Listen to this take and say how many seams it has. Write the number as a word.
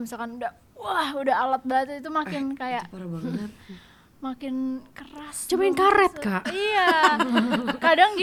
zero